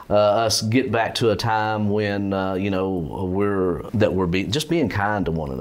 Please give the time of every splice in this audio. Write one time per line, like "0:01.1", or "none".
0:03.9